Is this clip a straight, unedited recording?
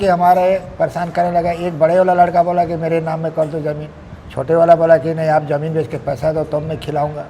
yes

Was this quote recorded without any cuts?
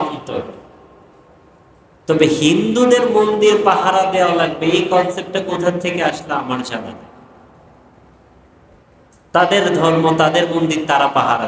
yes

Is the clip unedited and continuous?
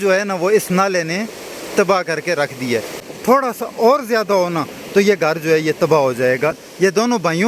no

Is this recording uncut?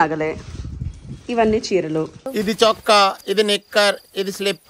no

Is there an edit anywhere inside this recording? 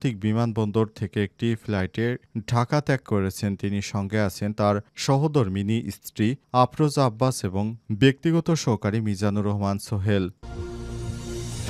yes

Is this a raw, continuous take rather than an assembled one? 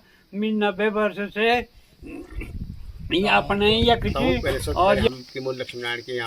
no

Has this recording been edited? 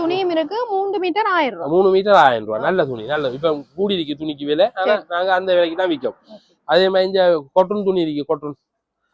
no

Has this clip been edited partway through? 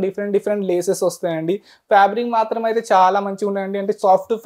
no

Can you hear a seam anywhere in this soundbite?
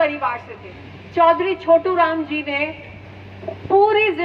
no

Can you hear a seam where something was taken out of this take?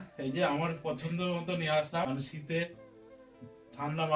yes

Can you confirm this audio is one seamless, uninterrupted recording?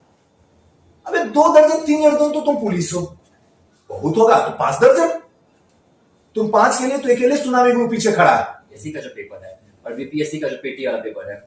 no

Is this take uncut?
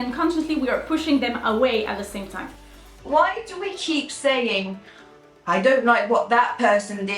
no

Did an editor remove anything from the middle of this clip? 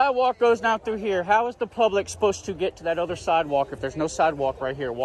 no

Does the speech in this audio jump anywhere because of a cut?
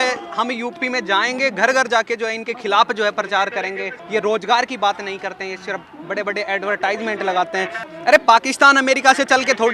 yes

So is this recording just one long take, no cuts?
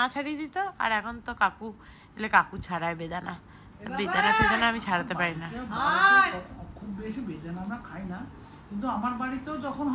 yes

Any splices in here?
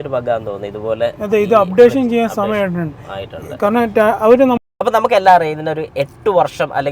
yes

